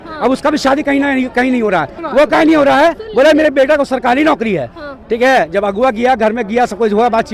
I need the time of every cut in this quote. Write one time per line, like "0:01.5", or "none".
0:02.0